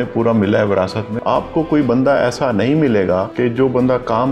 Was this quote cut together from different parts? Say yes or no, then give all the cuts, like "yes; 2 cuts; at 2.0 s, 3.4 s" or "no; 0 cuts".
yes; 2 cuts; at 1.1 s, 3.3 s